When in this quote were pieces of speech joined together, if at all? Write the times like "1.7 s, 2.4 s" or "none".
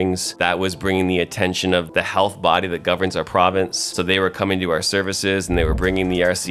1.9 s, 3.9 s